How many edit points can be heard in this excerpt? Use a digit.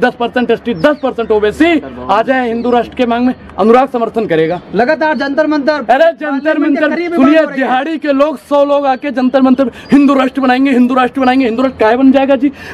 0